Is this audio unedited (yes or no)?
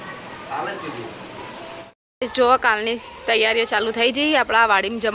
no